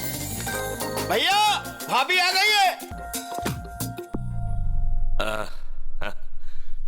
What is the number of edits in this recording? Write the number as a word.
one